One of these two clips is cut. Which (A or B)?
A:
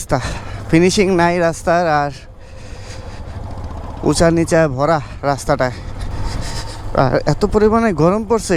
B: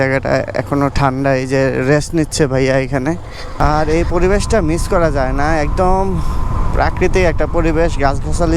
B